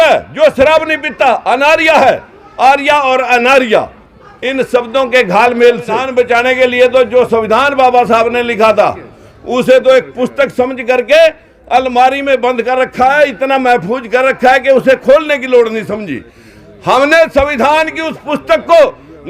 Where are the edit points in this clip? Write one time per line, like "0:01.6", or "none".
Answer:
0:06.0